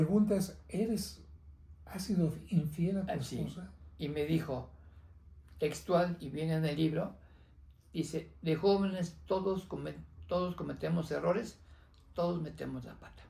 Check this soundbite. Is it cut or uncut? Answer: uncut